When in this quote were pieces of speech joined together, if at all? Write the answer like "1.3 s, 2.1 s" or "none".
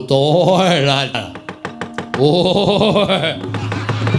1.1 s